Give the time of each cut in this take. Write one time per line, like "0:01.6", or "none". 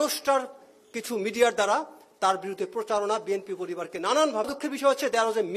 0:04.5